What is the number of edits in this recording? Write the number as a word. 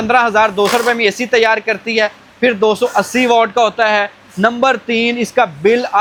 zero